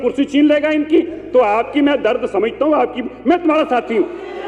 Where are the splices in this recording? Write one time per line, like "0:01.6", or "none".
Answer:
none